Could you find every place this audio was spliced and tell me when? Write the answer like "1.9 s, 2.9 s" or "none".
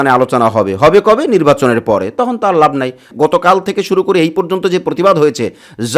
3.1 s